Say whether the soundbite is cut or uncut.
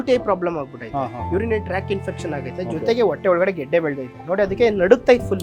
uncut